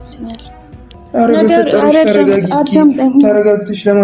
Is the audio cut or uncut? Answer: cut